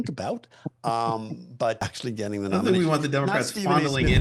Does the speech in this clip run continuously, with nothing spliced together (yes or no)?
no